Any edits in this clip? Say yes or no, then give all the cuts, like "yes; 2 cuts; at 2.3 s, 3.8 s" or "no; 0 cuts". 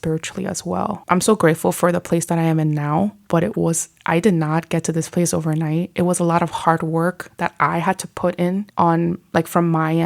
yes; 1 cut; at 8.7 s